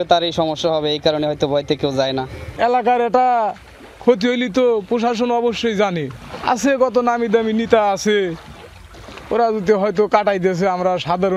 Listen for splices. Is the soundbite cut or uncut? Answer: uncut